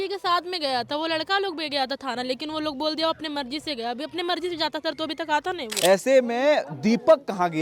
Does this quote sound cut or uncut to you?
cut